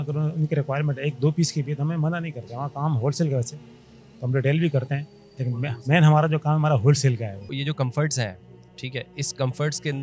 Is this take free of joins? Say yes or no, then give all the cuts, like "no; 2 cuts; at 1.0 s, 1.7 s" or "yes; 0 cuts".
no; 1 cut; at 7.5 s